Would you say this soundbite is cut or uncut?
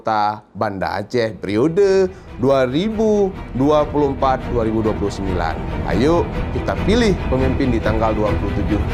uncut